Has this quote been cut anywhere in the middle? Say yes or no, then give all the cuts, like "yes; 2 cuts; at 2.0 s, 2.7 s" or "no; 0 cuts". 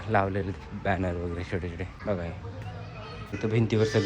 yes; 2 cuts; at 2.0 s, 3.3 s